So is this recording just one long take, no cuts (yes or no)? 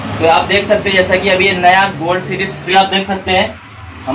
no